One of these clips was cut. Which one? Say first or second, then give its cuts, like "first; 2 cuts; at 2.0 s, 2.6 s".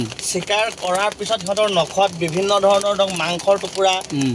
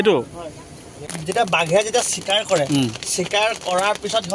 second; 1 cut; at 1.0 s